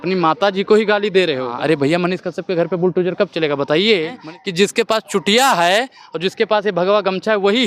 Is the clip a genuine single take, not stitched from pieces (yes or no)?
no